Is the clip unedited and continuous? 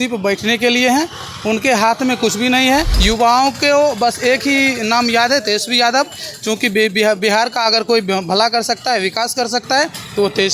no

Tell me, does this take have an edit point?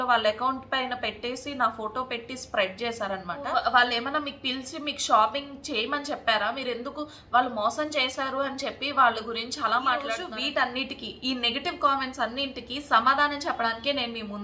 yes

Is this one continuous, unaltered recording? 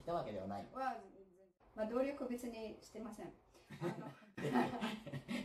no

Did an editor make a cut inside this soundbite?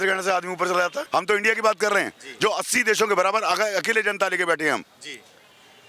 yes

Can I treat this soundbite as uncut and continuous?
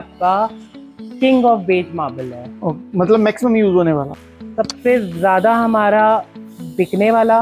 yes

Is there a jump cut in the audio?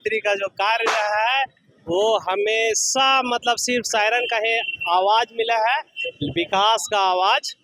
no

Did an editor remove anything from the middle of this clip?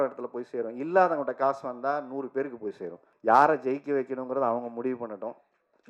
yes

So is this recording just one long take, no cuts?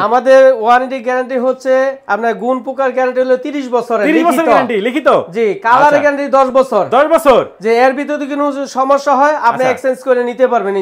yes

